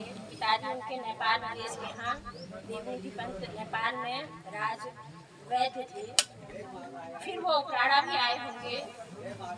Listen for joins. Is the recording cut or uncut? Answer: uncut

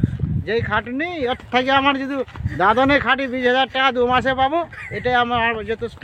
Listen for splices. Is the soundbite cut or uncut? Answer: uncut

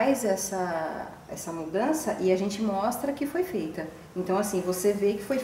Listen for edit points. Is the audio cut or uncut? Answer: uncut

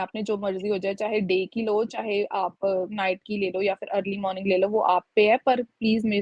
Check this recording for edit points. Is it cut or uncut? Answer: uncut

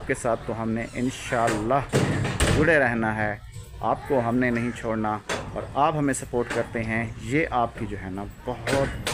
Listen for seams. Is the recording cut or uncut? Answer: uncut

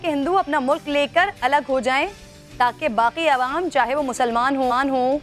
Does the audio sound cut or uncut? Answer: uncut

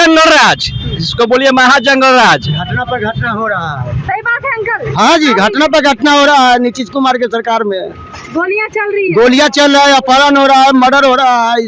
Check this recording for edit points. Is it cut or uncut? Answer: uncut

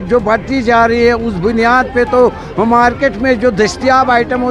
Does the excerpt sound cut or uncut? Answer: uncut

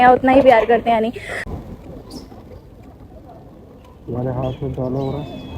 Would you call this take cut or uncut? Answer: cut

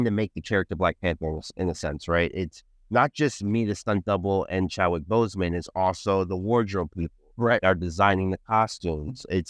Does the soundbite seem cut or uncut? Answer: uncut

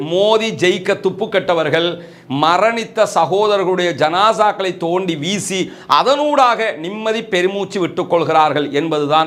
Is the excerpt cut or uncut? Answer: uncut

